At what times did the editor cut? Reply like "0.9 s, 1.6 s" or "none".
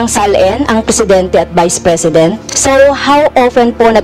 2.5 s